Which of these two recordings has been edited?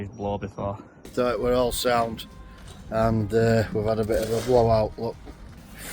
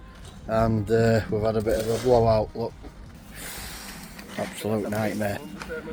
first; 1 cut; at 1.0 s

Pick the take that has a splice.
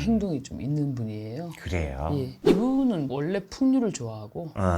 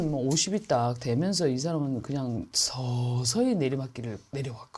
first; 1 cut; at 2.4 s

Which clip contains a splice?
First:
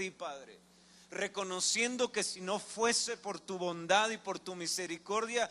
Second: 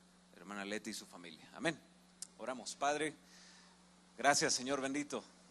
second; 1 cut; at 4.6 s

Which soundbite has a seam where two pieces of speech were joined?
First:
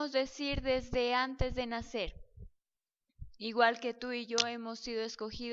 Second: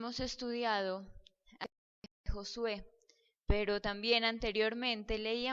first; 1 cut; at 1.9 s

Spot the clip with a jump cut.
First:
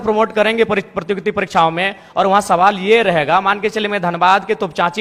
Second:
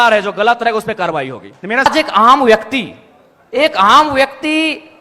second; 1 cut; at 1.9 s

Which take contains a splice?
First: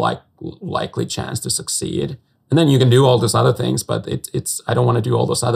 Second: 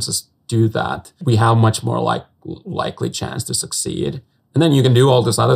second; 1 cut; at 1.1 s

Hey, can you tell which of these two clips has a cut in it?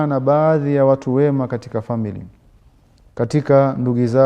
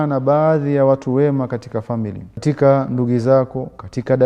second; 1 cut; at 2.4 s

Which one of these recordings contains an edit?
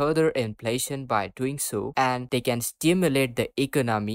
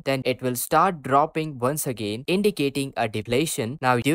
first; 1 cut; at 1.9 s

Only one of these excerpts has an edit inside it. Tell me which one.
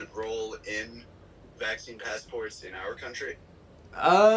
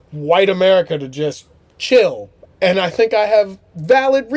second; 1 cut; at 2.4 s

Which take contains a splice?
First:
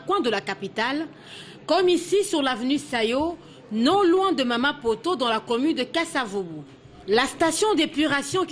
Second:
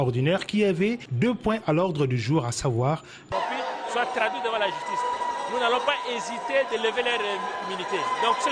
second; 1 cut; at 3.3 s

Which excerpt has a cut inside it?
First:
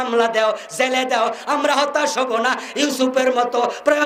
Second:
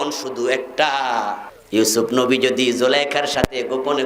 second; 1 cut; at 1.5 s

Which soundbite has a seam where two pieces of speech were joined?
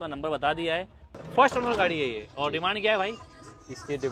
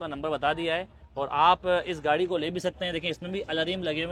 first; 1 cut; at 1.0 s

